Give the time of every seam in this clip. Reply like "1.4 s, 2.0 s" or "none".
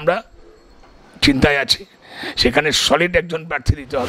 none